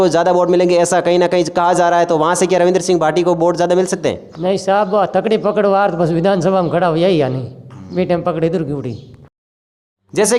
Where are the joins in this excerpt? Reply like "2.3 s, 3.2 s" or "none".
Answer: none